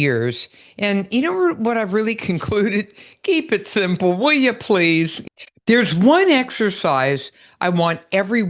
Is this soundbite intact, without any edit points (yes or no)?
no